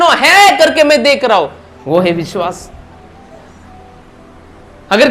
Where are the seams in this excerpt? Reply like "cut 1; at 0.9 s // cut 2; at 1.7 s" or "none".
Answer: cut 1; at 1.7 s